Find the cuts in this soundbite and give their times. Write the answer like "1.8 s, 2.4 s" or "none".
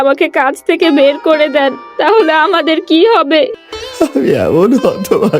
3.5 s